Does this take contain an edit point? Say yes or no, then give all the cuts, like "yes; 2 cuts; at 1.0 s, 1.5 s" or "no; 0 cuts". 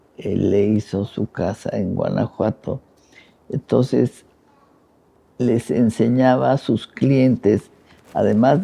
no; 0 cuts